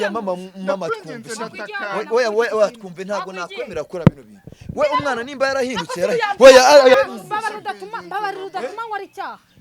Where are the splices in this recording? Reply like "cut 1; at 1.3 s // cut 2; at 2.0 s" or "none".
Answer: cut 1; at 7.0 s